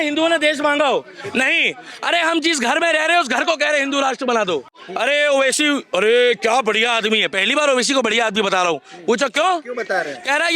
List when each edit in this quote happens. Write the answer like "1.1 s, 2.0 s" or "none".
4.8 s